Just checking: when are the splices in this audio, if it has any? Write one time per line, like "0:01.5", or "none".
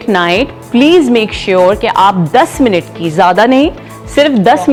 none